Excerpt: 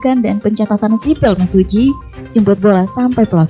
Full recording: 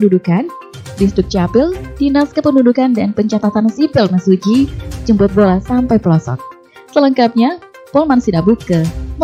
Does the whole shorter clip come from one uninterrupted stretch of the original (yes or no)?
yes